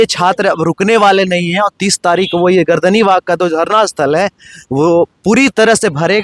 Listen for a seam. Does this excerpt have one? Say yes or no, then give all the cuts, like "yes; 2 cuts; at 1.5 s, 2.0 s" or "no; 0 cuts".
no; 0 cuts